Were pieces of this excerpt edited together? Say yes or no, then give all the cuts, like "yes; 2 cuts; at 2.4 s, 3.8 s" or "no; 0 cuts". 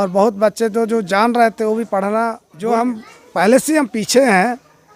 yes; 1 cut; at 2.5 s